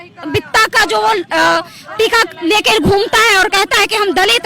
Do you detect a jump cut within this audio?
no; 0 cuts

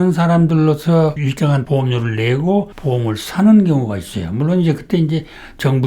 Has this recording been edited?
yes; 2 cuts; at 1.2 s, 2.8 s

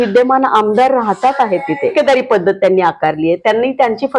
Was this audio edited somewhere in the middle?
yes; 1 cut; at 1.9 s

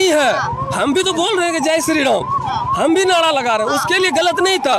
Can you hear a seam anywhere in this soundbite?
no; 0 cuts

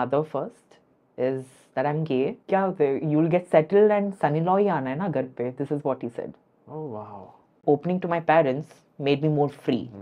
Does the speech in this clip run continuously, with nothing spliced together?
no; 2 cuts; at 2.4 s, 7.6 s

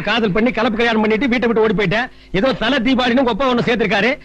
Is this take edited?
yes; 1 cut; at 2.1 s

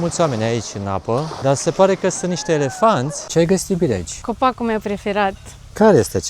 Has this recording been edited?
yes; 3 cuts; at 1.3 s, 3.2 s, 4.2 s

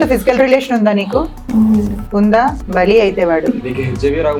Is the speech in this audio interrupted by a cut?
no; 0 cuts

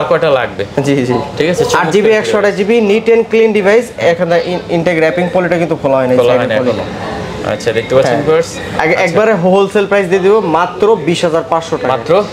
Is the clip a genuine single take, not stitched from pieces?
yes; 0 cuts

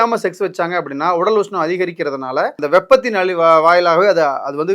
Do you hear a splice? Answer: yes; 1 cut; at 2.6 s

